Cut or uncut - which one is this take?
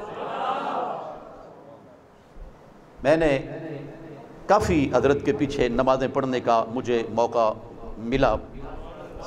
uncut